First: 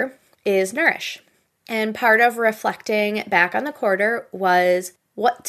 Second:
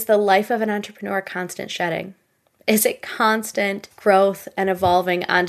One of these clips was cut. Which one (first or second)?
second